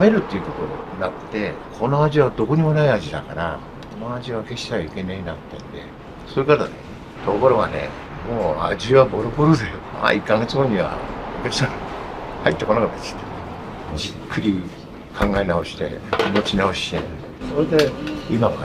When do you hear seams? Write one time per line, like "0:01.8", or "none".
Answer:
none